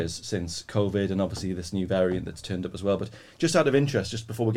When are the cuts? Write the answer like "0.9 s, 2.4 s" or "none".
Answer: none

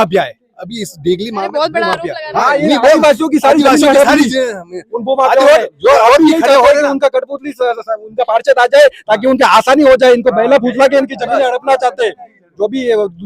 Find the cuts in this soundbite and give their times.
none

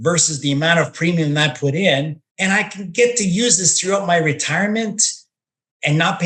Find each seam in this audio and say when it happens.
2.2 s

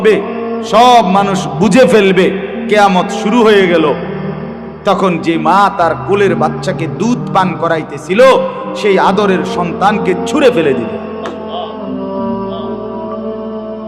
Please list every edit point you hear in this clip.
10.9 s

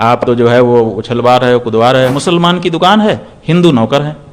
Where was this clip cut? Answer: 2.2 s

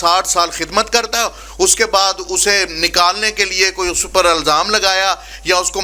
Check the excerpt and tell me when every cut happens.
none

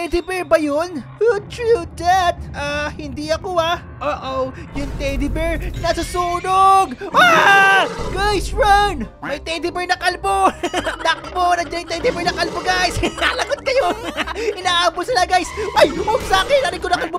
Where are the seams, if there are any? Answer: 15.7 s

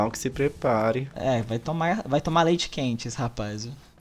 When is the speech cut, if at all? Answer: 1.1 s

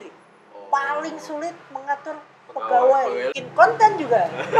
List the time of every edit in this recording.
3.4 s

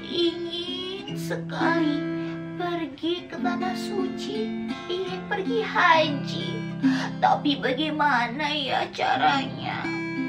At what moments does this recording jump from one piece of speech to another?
none

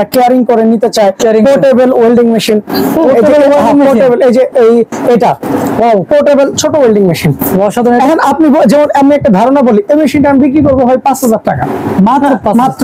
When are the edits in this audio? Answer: none

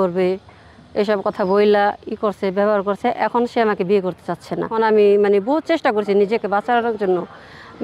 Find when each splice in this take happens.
4.7 s

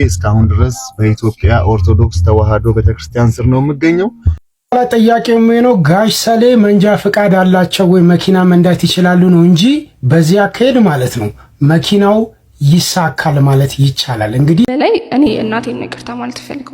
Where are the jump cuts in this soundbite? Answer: 4.4 s, 14.6 s

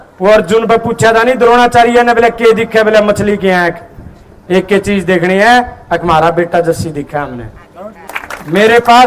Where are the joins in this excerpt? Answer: 8.0 s

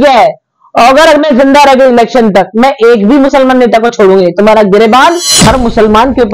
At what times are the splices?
5.3 s

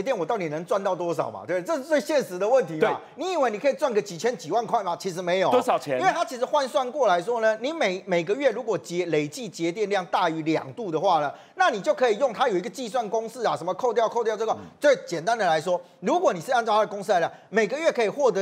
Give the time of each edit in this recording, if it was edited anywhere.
none

